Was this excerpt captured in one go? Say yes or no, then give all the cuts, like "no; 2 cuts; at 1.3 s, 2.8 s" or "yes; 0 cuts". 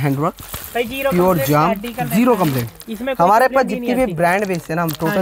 yes; 0 cuts